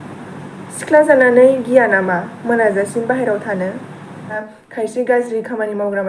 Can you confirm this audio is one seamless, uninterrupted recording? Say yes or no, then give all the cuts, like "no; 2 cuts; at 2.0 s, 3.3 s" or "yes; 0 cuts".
no; 1 cut; at 4.5 s